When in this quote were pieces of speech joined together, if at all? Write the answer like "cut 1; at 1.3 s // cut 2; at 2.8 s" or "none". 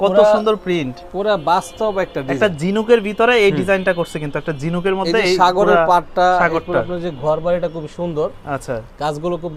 none